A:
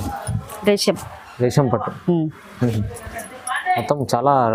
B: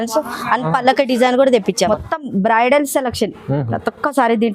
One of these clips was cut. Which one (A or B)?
B